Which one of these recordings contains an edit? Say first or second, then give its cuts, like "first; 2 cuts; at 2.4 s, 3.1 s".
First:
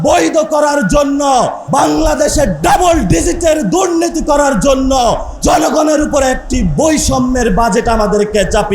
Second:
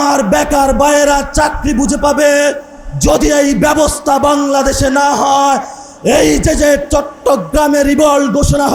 first; 2 cuts; at 1.6 s, 5.3 s